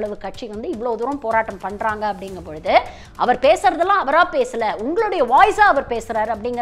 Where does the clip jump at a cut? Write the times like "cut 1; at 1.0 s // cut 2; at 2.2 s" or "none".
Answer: cut 1; at 3.0 s